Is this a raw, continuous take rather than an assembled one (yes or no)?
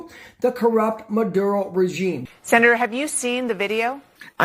no